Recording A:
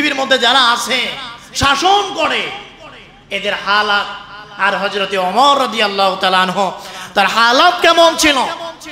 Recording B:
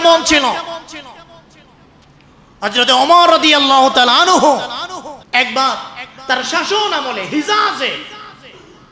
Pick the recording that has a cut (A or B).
B